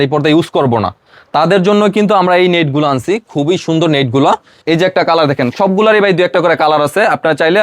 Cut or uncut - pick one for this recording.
cut